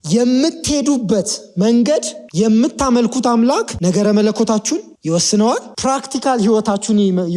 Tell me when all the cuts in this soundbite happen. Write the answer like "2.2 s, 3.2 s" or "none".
2.2 s, 3.7 s, 4.9 s, 5.7 s